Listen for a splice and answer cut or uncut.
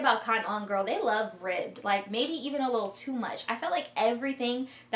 uncut